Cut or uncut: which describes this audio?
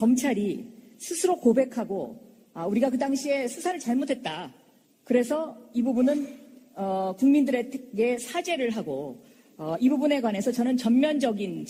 uncut